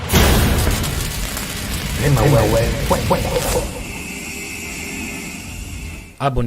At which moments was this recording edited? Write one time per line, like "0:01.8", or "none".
0:01.6
0:05.5